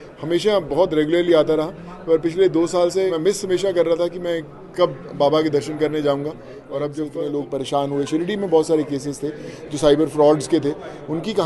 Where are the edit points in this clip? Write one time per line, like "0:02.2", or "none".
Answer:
0:03.1
0:07.0